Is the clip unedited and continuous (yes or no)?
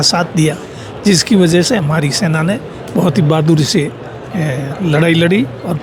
yes